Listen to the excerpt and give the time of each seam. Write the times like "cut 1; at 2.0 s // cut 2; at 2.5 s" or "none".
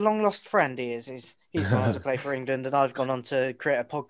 none